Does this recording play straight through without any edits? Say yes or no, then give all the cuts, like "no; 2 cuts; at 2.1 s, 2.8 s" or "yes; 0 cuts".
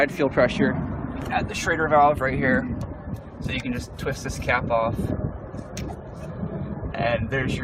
no; 1 cut; at 6.7 s